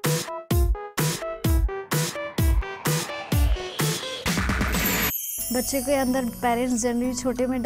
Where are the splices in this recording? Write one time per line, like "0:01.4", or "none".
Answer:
0:05.2